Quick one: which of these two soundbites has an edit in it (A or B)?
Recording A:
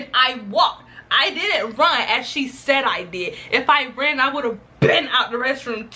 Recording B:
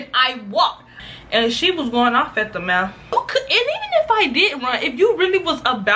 B